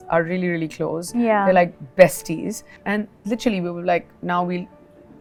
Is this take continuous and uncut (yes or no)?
yes